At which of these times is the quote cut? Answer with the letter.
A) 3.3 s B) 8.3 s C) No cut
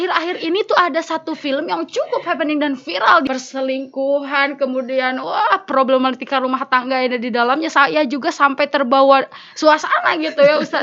A